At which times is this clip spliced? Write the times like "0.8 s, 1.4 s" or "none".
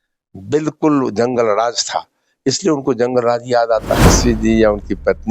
4.2 s

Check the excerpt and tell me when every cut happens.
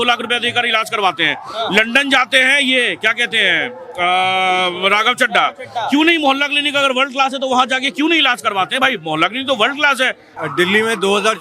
10.3 s

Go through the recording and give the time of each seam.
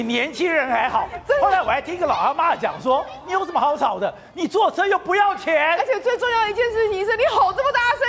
none

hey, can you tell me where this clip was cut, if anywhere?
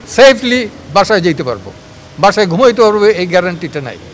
none

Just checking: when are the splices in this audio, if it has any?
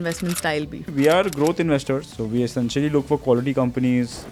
0.9 s, 2.1 s

